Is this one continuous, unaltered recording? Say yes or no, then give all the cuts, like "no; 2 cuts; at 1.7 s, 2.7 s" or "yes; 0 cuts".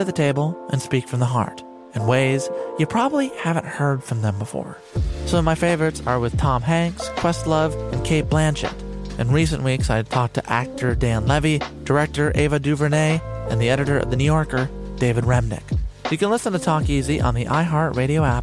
yes; 0 cuts